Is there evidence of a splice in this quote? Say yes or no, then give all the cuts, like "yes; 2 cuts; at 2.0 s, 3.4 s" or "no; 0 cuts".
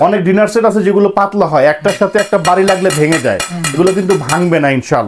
no; 0 cuts